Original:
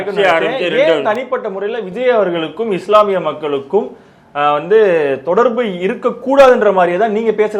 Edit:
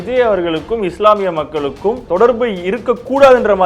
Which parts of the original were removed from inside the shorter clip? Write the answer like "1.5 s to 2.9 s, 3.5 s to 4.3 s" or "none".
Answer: 3.9 s to 5.2 s

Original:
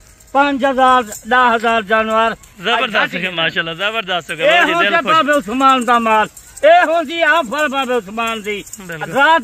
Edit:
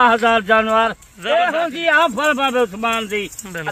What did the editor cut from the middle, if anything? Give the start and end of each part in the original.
2.5 s to 6.4 s

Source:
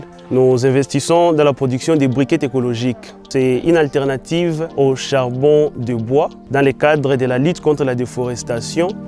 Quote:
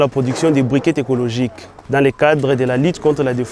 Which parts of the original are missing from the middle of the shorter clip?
3.2 s to 6.4 s

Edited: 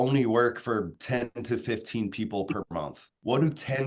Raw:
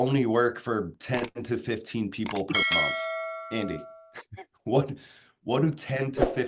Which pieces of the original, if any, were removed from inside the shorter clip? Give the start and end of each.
2.9 s to 5.1 s

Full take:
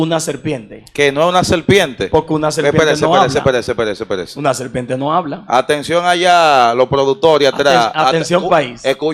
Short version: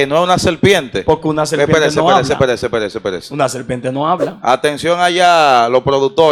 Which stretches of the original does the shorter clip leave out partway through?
none

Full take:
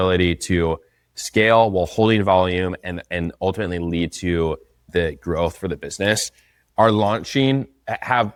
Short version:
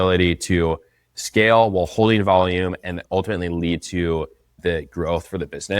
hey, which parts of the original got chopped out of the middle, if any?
3.0 s to 3.3 s

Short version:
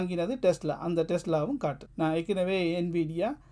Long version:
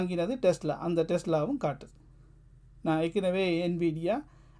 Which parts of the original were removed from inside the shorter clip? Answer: 1.8 s to 2.7 s

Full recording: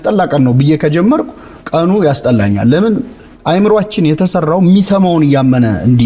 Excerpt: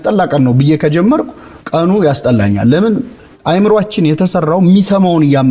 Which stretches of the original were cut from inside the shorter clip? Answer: none

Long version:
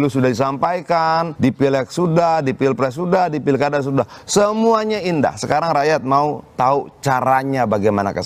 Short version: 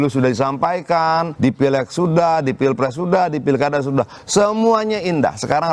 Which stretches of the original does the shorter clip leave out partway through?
none

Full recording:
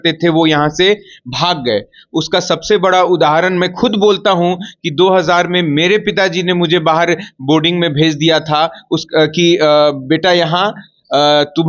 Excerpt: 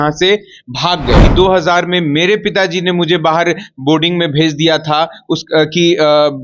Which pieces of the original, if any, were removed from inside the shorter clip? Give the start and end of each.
1.8 s to 4.9 s

